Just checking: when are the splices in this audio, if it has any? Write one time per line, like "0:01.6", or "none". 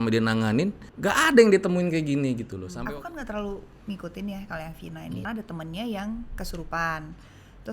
0:00.9
0:02.6
0:05.2